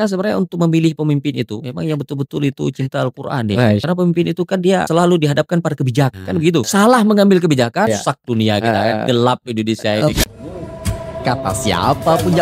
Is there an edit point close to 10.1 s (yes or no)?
yes